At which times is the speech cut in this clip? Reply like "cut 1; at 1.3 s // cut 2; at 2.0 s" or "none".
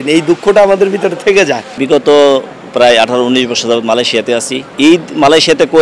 none